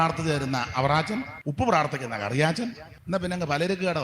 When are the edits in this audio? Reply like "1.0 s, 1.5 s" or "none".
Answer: 1.4 s, 2.9 s